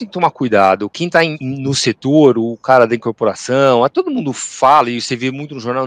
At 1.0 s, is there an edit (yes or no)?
yes